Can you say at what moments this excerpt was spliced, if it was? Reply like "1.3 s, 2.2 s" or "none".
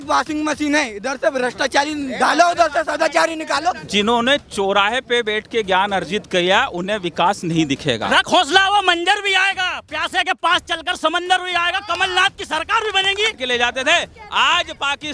3.8 s, 8.1 s, 13.4 s